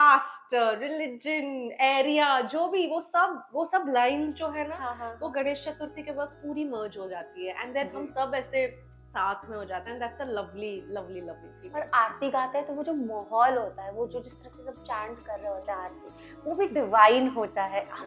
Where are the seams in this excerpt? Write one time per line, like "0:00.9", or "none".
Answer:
none

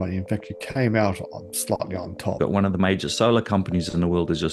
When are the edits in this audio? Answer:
0:02.4

